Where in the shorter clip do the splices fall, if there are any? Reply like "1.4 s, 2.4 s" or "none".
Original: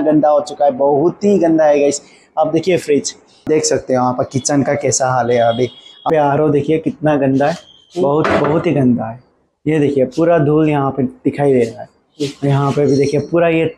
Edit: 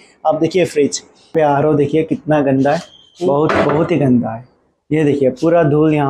1.1 s